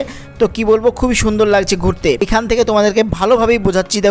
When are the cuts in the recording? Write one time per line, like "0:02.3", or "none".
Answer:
0:02.3